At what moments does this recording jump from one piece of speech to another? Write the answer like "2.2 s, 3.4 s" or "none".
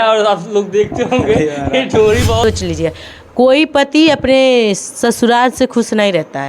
2.4 s